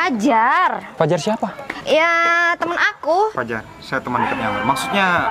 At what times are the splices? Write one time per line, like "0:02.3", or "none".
0:00.9
0:01.7
0:03.3